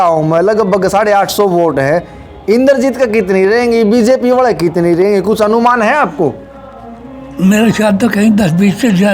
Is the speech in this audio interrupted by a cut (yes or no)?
no